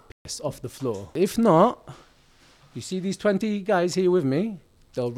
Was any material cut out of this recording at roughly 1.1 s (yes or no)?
yes